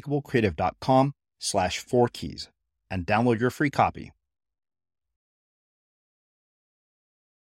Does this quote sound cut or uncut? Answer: uncut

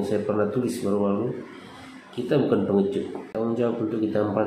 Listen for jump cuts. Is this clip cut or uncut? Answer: cut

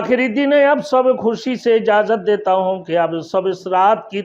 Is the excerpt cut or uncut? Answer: uncut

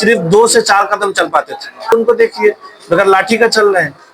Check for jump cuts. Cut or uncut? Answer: cut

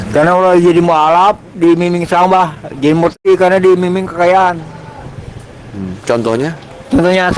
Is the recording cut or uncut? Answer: cut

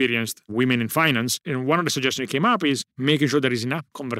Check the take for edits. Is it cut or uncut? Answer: cut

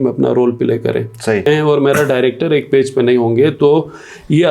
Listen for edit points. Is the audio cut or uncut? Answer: cut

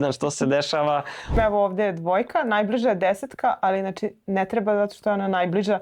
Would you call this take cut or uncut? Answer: cut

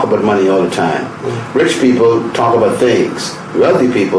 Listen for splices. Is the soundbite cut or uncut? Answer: uncut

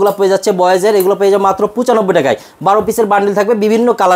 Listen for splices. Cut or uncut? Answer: uncut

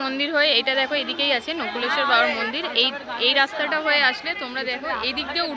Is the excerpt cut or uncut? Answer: uncut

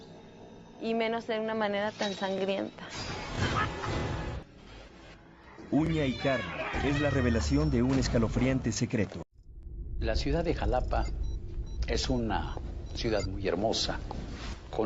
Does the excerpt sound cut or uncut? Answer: uncut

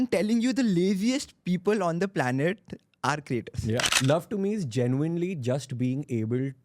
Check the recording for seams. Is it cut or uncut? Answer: cut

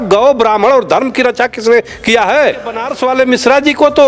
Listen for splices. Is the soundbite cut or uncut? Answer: cut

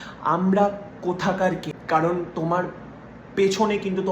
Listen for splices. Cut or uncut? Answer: cut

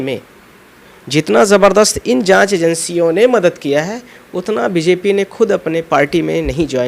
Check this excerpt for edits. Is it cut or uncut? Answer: uncut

